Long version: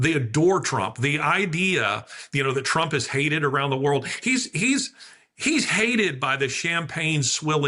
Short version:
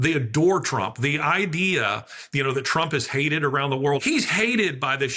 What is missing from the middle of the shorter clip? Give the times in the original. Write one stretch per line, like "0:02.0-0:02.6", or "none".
0:04.0-0:05.4